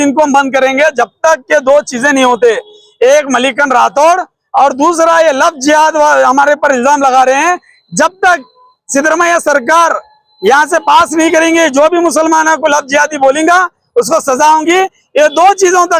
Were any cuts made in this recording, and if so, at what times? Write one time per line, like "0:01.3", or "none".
none

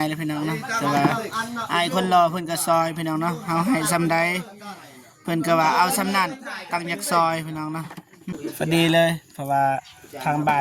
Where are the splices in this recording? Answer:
0:08.3

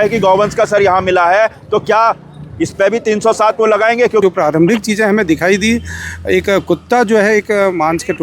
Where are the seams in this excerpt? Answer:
0:04.2

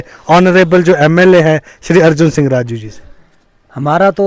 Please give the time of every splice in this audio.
none

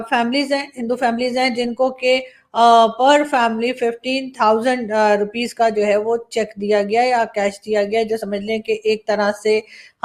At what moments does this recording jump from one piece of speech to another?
none

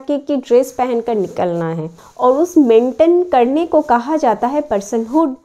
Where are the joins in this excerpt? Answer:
0:02.0

